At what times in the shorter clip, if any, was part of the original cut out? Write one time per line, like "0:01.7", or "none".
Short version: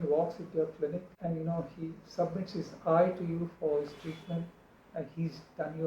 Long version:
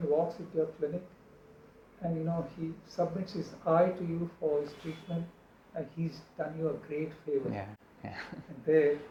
0:01.1